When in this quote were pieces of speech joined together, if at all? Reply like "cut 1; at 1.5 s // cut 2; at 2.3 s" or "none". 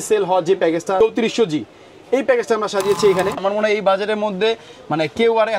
cut 1; at 1.0 s // cut 2; at 3.4 s